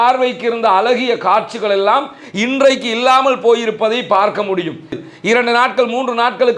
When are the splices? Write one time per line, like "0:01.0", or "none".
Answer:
0:05.0